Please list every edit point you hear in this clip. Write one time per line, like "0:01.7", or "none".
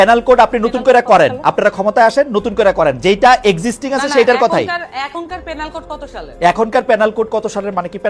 none